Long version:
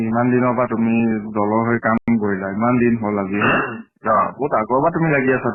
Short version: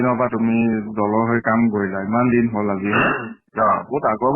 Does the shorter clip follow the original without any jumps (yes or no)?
no